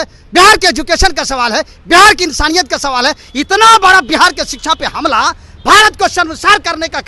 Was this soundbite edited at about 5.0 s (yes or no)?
no